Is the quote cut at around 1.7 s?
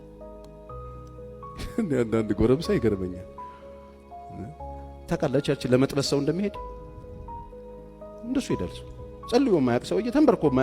yes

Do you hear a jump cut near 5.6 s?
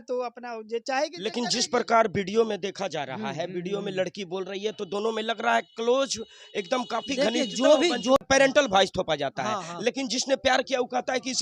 no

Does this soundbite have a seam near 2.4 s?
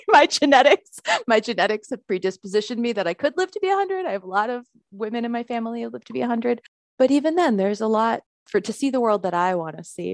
no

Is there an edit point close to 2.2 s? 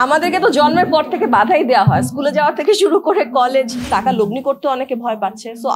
no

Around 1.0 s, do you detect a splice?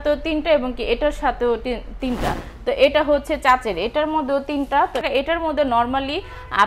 no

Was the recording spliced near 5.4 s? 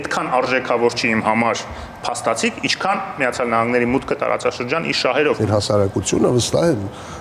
yes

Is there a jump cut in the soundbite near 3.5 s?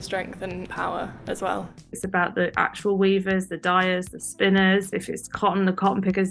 no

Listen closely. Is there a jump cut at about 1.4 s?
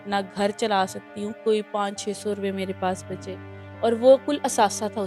yes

